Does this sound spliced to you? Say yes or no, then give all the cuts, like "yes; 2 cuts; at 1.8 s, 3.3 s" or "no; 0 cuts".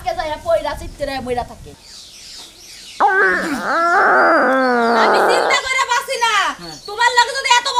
yes; 1 cut; at 1.7 s